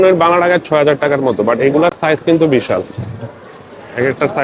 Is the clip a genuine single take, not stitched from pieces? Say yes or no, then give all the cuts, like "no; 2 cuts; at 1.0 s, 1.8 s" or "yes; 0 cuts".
yes; 0 cuts